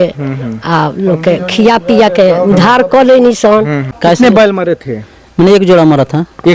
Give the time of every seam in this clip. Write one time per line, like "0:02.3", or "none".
0:03.8